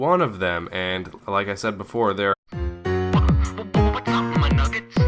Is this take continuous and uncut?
yes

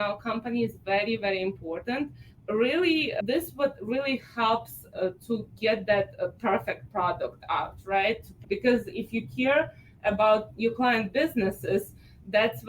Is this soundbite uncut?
no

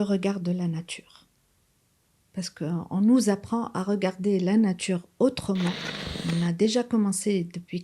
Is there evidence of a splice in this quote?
yes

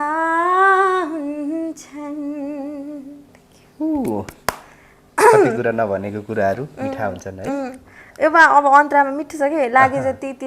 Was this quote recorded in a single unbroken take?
yes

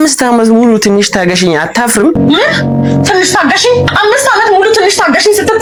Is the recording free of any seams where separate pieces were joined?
yes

